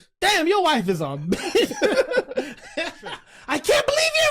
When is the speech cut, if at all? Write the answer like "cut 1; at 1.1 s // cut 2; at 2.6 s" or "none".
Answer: cut 1; at 3.3 s